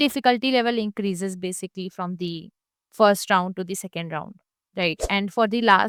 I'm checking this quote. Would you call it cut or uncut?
uncut